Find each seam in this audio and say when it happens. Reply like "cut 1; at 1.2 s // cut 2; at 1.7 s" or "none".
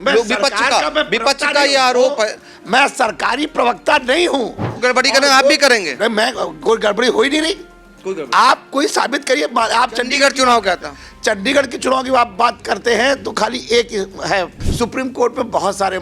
cut 1; at 4.7 s // cut 2; at 14.6 s

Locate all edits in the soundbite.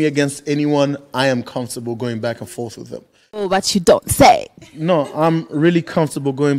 cut 1; at 3.5 s

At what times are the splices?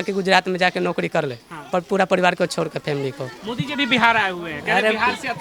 none

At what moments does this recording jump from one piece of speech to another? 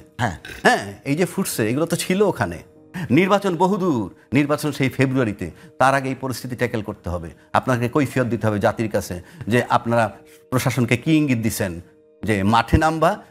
cut 1; at 3.0 s

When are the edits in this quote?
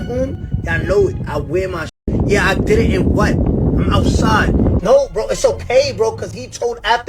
cut 1; at 2.0 s // cut 2; at 4.8 s

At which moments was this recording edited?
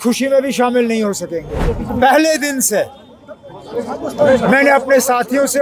cut 1; at 1.6 s

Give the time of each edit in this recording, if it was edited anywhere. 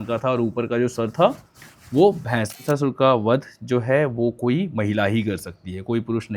cut 1; at 2.6 s

